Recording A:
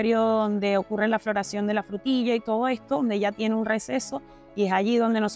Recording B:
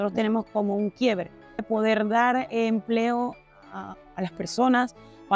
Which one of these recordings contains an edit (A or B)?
B